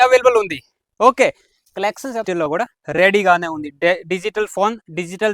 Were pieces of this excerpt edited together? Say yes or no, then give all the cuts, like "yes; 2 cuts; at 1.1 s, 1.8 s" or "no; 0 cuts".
yes; 1 cut; at 2.2 s